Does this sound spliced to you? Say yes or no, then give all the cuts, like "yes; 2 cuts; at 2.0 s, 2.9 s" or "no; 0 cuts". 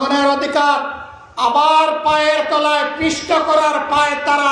no; 0 cuts